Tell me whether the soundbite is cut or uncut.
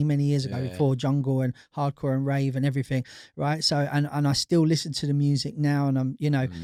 uncut